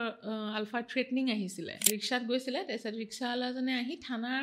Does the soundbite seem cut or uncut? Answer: cut